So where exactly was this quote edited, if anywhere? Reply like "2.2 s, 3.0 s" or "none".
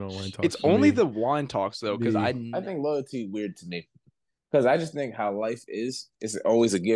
2.5 s